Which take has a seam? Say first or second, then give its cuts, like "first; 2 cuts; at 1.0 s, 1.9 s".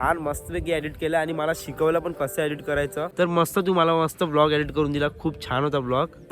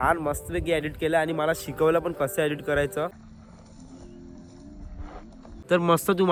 first; 1 cut; at 3.1 s